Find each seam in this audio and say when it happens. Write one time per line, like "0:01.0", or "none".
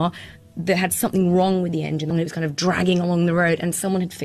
0:02.1

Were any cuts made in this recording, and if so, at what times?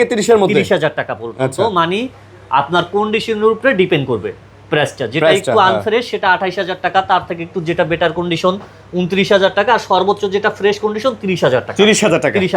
none

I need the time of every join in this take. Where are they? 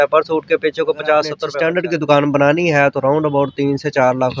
0:01.5

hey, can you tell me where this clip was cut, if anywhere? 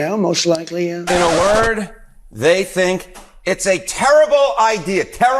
0:01.0

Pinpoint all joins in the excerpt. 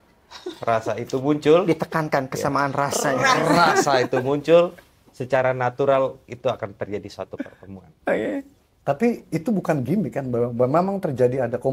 none

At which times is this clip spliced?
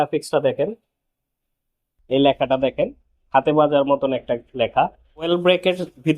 0:05.3

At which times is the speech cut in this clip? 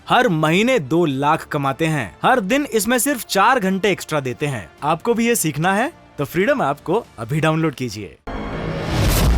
0:08.5

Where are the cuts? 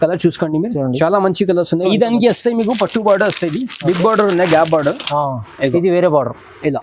0:01.9

